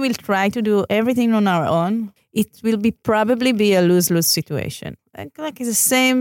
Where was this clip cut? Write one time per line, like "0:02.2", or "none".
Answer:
0:00.9
0:02.2
0:04.9